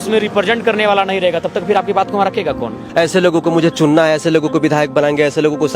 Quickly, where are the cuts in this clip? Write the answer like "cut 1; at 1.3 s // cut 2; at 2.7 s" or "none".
cut 1; at 2.8 s